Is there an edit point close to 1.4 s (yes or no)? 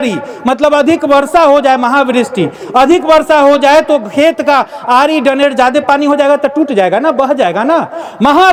no